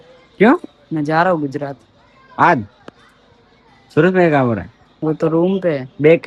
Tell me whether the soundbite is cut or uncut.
uncut